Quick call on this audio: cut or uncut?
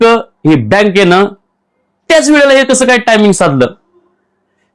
uncut